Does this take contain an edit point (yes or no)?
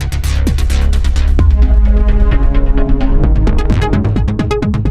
no